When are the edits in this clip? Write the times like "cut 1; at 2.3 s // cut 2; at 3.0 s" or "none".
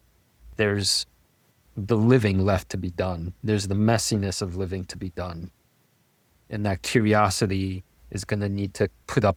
none